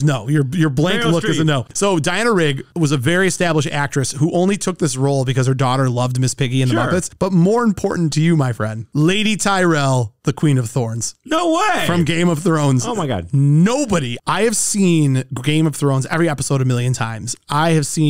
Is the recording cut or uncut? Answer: cut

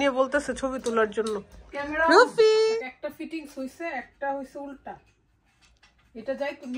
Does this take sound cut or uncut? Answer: cut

